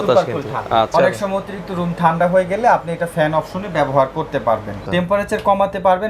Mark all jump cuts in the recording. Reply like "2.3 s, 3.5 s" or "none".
0.9 s, 4.9 s